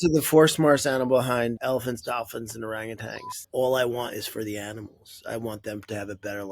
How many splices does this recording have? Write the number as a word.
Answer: two